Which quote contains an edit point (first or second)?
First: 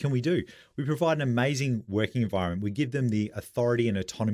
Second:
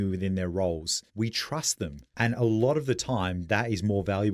second